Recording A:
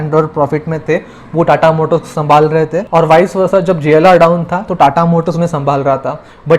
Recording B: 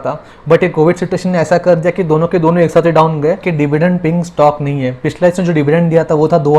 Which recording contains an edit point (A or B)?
B